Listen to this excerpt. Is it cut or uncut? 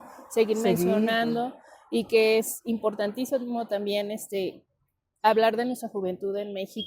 uncut